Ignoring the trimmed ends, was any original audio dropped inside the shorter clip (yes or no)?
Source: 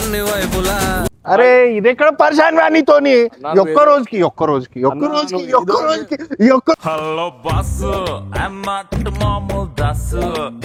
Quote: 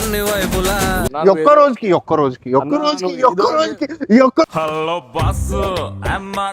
yes